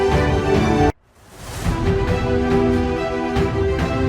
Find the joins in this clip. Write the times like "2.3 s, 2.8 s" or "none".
0.9 s